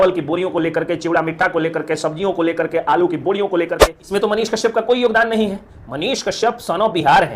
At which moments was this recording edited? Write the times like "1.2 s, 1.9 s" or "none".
3.9 s